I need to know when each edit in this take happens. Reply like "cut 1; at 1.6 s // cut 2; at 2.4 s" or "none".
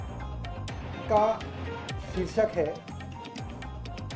cut 1; at 0.9 s